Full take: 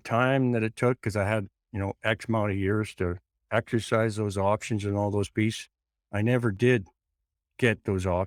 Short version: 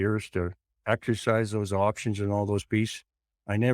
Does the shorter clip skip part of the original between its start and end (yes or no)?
no